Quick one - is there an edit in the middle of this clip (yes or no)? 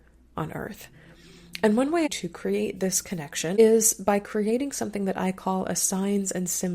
yes